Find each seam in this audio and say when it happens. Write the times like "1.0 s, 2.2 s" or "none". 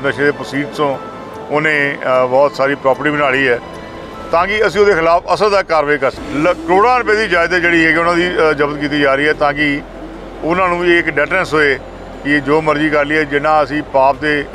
6.2 s